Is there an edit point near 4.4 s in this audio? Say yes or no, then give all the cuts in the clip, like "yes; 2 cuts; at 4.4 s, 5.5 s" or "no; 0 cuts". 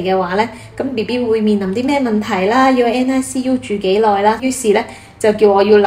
yes; 1 cut; at 4.4 s